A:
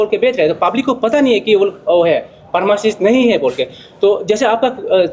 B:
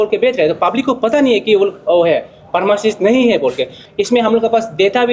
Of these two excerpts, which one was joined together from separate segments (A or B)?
B